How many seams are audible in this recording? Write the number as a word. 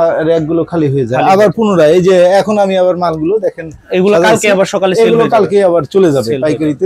zero